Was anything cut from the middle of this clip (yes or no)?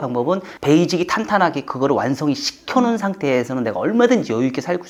no